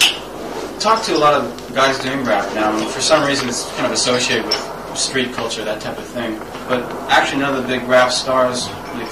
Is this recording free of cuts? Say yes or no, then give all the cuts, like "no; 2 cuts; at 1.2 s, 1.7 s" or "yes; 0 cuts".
no; 1 cut; at 2.0 s